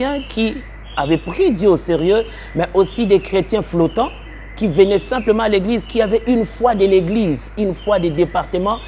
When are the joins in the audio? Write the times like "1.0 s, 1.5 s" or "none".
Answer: none